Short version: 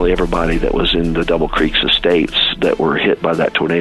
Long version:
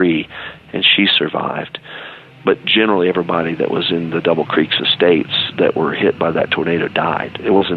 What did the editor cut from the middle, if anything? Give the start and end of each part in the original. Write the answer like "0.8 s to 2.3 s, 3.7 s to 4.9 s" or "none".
none